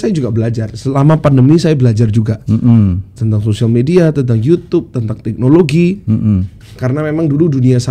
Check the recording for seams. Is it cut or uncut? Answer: uncut